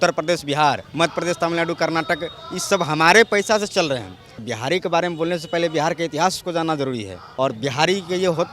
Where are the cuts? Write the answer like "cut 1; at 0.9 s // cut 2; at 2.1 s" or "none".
cut 1; at 0.9 s // cut 2; at 4.2 s // cut 3; at 7.2 s